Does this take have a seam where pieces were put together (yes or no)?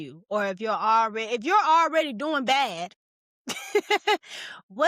no